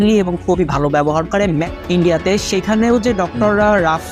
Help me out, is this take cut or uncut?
cut